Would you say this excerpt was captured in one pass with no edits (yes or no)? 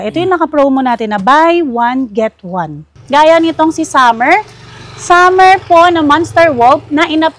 no